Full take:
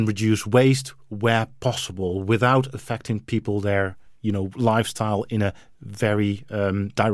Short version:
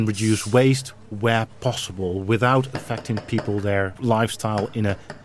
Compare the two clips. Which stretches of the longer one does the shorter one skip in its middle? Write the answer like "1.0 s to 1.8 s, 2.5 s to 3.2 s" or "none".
4.0 s to 4.5 s